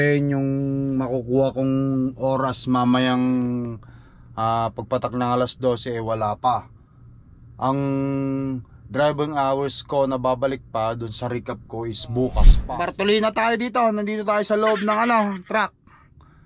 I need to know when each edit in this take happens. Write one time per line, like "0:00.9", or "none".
0:12.6